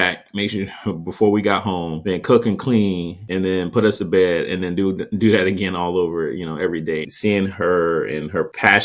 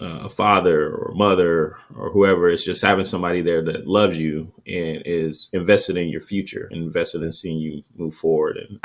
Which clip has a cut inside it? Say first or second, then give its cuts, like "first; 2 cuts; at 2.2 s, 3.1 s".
first; 1 cut; at 7.1 s